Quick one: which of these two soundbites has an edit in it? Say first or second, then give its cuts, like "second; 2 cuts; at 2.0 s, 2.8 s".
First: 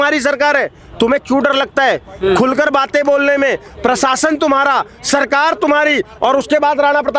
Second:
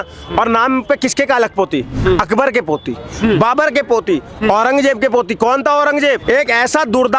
second; 1 cut; at 6.2 s